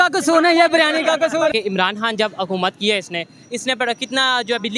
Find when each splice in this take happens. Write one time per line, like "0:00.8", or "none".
0:01.5